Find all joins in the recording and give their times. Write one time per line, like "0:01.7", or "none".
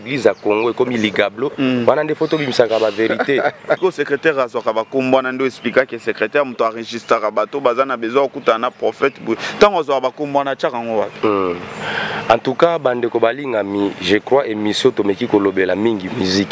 0:03.8